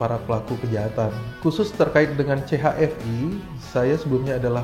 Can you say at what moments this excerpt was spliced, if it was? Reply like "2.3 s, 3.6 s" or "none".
1.3 s